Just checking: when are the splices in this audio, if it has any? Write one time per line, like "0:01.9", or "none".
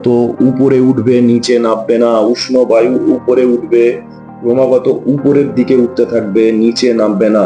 none